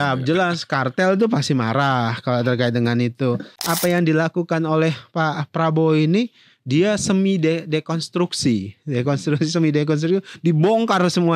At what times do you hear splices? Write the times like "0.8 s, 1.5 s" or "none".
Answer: 3.5 s